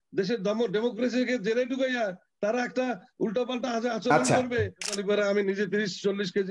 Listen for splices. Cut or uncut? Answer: cut